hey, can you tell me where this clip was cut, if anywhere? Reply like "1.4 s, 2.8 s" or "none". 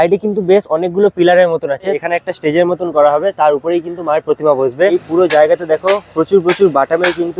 2.0 s, 4.9 s